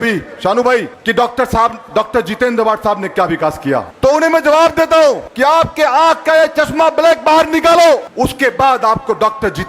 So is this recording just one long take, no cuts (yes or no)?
no